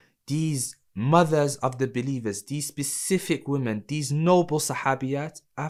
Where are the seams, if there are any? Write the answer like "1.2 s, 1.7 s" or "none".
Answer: none